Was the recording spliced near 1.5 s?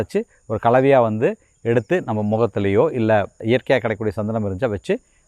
no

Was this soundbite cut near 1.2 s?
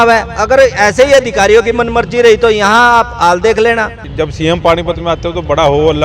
no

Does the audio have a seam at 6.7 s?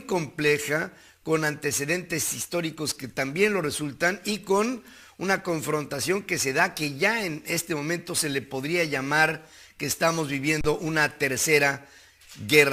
yes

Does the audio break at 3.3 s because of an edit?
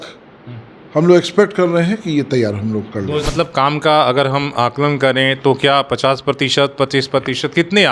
yes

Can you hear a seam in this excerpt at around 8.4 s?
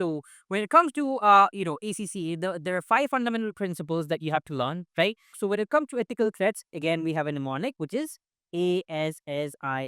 no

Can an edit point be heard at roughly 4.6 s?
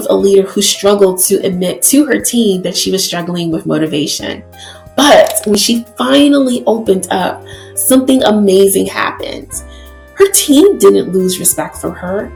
no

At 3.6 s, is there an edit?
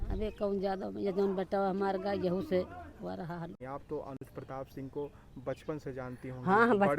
yes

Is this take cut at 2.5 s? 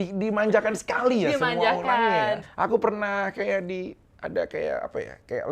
yes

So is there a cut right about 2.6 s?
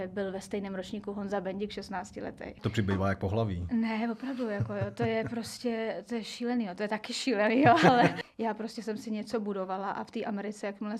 yes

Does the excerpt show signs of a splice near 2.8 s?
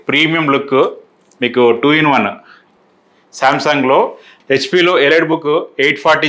no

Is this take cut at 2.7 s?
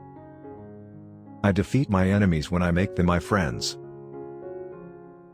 no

